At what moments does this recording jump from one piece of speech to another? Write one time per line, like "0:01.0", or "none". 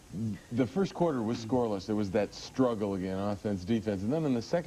none